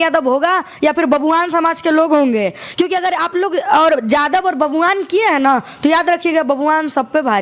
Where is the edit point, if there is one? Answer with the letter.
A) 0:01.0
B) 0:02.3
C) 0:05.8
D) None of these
D